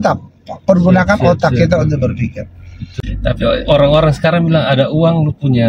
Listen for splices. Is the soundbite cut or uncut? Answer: cut